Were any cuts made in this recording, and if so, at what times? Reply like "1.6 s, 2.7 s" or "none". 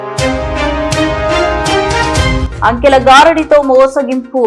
none